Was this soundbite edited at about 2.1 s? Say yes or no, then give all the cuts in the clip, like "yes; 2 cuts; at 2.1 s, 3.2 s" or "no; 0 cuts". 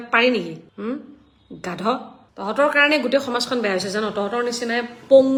no; 0 cuts